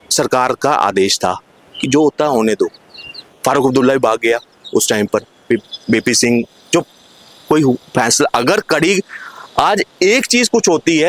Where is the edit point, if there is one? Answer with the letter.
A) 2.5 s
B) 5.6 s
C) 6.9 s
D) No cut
D